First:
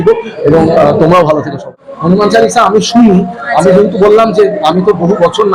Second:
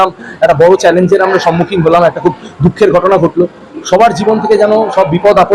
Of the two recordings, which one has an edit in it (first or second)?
first